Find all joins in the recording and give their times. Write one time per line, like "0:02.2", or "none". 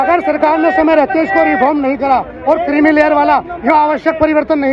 none